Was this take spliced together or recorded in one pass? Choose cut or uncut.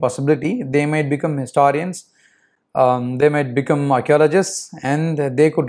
uncut